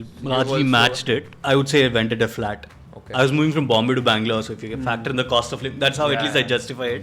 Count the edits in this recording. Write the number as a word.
one